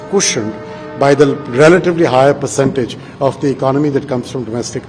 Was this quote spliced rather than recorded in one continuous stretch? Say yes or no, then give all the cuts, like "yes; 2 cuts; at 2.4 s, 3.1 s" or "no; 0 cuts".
no; 0 cuts